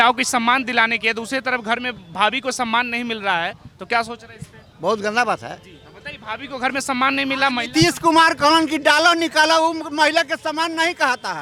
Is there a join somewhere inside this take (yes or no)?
no